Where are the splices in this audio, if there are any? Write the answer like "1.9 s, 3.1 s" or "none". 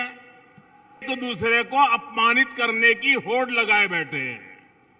1.0 s